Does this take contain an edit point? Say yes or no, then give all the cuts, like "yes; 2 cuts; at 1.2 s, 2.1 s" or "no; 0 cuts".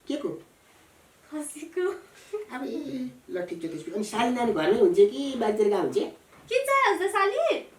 no; 0 cuts